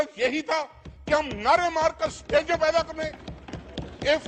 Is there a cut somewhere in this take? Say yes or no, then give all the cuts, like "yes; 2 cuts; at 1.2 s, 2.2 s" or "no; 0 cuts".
no; 0 cuts